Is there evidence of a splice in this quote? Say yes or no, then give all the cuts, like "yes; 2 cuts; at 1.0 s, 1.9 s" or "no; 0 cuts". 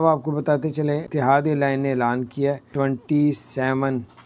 yes; 2 cuts; at 1.1 s, 2.7 s